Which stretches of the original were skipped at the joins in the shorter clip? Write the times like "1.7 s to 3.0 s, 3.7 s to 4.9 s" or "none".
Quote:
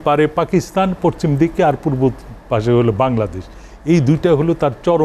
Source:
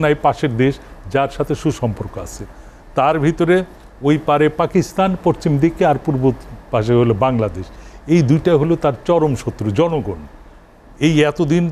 none